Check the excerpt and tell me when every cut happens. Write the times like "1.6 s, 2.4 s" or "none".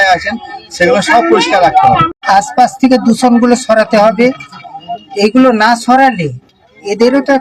2.2 s